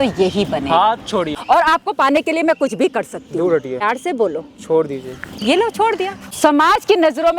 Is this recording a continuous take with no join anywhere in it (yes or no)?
no